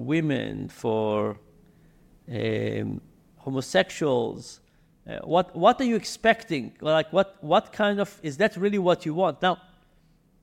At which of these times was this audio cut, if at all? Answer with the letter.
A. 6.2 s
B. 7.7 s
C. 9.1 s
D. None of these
D